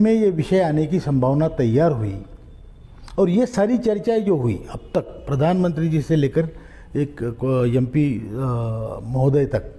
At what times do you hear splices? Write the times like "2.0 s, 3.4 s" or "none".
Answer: none